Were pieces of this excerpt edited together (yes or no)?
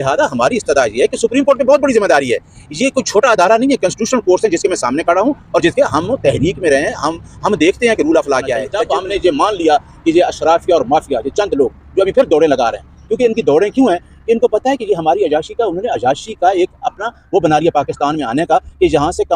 yes